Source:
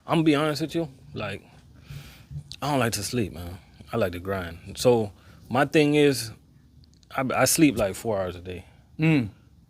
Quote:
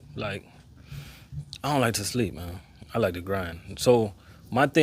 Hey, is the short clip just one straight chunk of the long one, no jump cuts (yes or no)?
yes